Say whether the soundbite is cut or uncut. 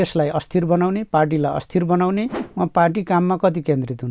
cut